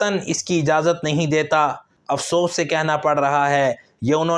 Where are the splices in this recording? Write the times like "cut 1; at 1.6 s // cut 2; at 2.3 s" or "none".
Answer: cut 1; at 1.9 s